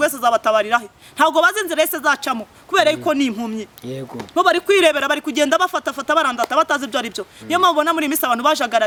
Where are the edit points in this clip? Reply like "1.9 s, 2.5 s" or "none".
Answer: none